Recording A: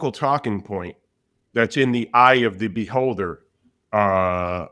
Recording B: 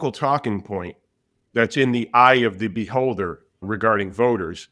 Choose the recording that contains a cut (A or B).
B